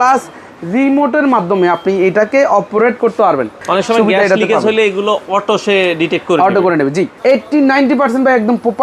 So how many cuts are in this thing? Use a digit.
2